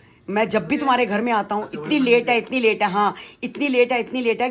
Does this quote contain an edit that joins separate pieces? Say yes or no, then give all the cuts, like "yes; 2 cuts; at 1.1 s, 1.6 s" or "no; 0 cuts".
no; 0 cuts